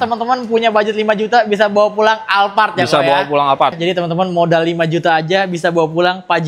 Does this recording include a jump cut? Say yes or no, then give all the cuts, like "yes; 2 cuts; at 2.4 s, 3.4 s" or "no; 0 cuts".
yes; 1 cut; at 3.8 s